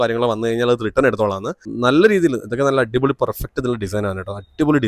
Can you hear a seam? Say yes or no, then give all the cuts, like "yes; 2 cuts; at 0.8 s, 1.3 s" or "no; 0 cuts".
yes; 1 cut; at 1.7 s